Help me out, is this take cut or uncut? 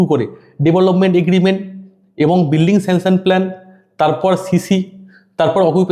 uncut